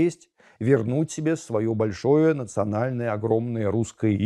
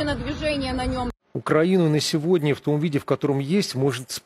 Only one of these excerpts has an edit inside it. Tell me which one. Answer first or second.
second